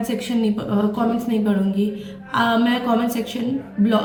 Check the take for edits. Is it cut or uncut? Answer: uncut